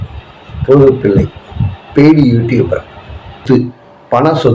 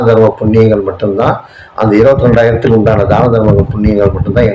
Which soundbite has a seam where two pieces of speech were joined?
first; 1 cut; at 3.4 s

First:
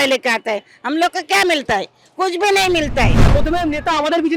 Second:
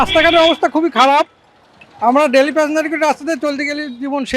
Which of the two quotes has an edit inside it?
first; 1 cut; at 3.2 s

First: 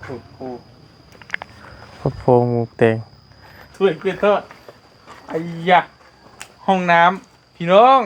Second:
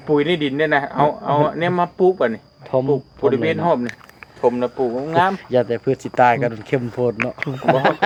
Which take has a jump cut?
first; 1 cut; at 3.7 s

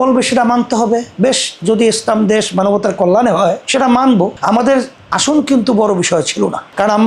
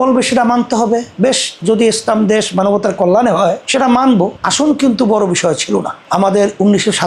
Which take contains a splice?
second; 2 cuts; at 4.4 s, 6.0 s

